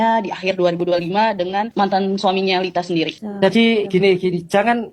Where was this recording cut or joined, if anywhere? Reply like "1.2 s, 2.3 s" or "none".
1.7 s, 3.2 s

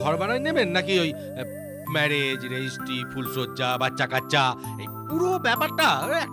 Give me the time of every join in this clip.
none

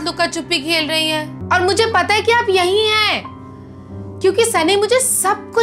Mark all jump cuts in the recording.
1.3 s

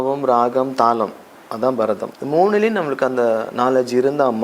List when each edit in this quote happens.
2.1 s

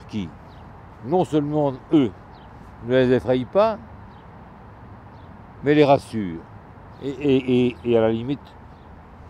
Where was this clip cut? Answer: none

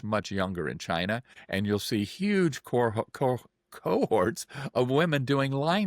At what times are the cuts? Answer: 1.3 s

